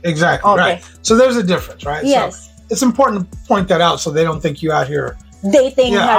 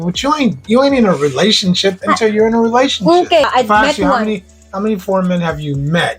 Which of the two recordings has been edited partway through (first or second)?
second